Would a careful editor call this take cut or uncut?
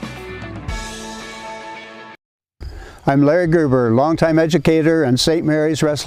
cut